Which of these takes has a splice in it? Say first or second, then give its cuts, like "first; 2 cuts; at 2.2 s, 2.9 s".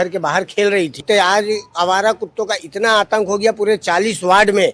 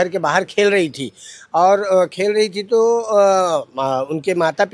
first; 1 cut; at 1.0 s